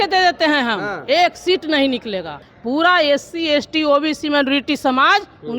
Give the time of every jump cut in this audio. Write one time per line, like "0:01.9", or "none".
0:02.5